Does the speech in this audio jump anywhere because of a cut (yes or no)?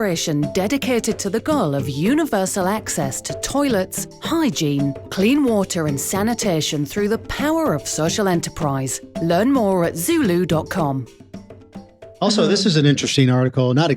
yes